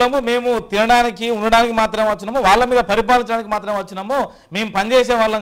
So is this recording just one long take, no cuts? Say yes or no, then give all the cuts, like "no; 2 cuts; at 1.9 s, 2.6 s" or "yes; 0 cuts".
yes; 0 cuts